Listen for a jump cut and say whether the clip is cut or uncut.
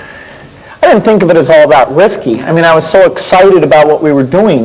uncut